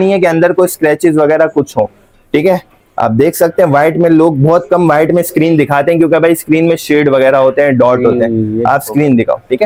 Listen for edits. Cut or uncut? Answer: uncut